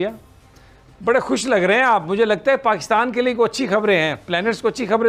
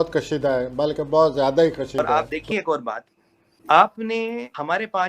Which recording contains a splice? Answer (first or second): second